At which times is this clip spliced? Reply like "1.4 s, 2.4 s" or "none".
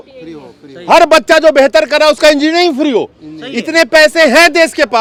none